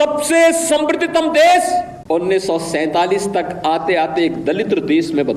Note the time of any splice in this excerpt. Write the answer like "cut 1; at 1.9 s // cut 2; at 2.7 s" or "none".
cut 1; at 2.0 s